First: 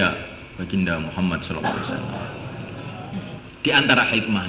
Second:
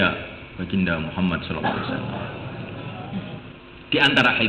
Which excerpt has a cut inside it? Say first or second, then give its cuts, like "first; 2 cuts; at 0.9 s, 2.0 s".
first; 1 cut; at 3.5 s